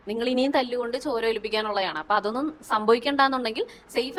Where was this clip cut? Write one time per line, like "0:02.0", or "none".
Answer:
none